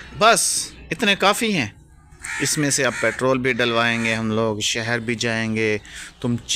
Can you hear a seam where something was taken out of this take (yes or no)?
no